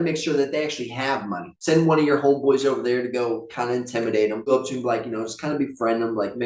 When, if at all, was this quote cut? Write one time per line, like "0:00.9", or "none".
0:01.5
0:04.5